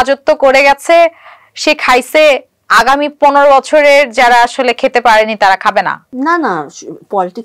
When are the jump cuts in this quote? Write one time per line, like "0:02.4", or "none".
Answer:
0:06.1